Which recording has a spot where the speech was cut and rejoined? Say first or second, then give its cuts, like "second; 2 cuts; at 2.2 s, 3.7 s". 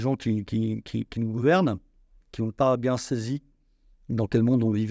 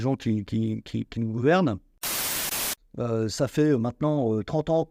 second; 1 cut; at 2.3 s